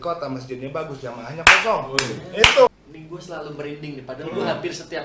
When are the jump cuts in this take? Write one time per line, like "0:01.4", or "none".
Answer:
0:02.7